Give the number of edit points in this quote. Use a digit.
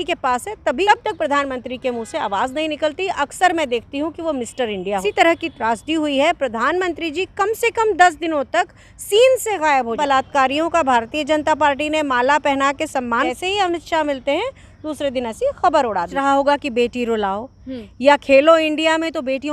5